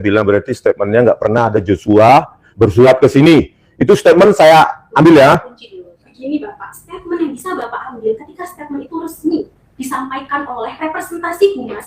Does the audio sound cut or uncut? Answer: uncut